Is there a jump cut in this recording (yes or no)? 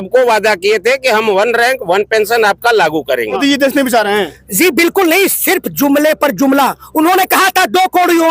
yes